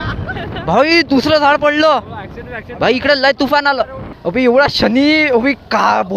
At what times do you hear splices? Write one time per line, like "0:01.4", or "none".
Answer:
0:04.1

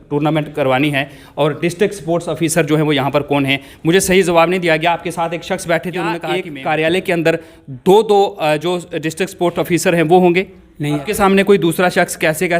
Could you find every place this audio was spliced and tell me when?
0:06.3
0:11.1

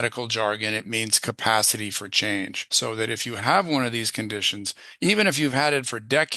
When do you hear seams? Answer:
0:02.6

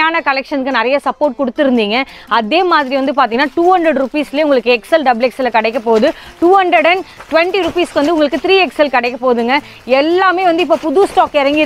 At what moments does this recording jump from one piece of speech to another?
none

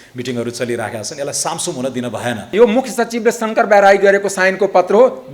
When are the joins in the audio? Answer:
0:02.5

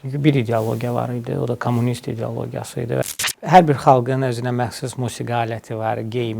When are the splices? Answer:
0:03.0

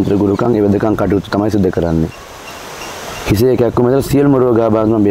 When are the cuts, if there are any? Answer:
none

